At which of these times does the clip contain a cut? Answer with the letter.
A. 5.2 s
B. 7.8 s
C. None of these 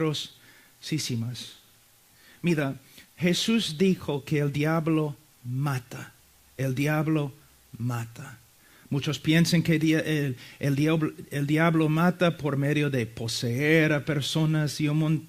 B